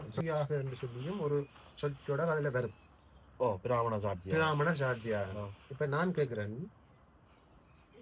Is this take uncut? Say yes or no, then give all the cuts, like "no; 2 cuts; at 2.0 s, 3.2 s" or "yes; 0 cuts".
yes; 0 cuts